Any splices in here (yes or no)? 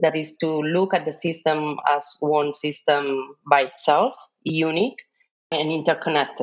yes